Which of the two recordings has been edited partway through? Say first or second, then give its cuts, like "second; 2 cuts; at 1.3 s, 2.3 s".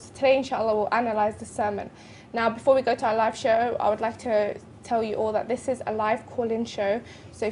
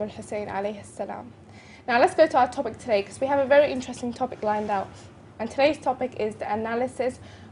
second; 1 cut; at 3.0 s